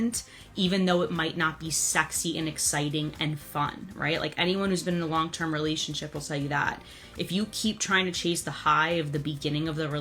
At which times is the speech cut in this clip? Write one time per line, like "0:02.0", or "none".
none